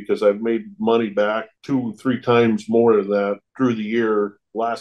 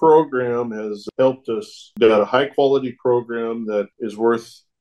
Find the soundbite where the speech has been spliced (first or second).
second